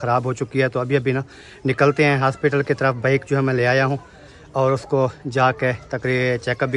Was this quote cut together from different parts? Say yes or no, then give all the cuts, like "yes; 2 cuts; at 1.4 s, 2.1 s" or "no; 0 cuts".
no; 0 cuts